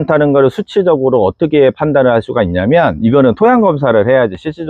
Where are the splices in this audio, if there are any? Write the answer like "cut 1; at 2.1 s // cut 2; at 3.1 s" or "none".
none